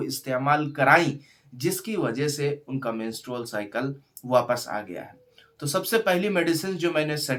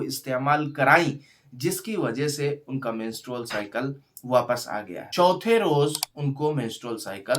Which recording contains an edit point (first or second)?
second